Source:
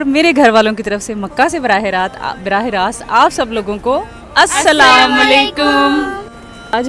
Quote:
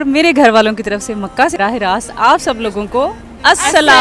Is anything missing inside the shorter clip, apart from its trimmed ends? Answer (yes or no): yes